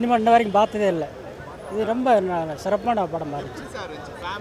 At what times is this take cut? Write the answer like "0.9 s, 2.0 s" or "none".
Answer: none